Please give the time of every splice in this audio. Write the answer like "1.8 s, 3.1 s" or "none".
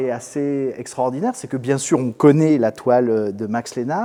none